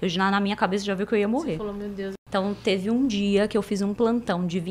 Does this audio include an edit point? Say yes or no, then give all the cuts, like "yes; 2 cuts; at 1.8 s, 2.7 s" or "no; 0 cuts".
yes; 1 cut; at 2.1 s